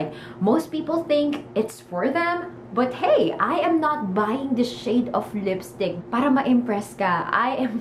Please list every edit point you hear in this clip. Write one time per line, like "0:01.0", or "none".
0:05.9